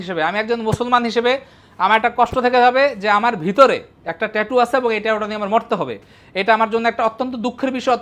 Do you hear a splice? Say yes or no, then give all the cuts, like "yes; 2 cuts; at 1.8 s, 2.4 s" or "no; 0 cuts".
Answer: no; 0 cuts